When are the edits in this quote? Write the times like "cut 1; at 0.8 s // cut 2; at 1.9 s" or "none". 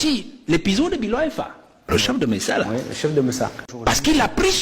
cut 1; at 1.9 s // cut 2; at 3.6 s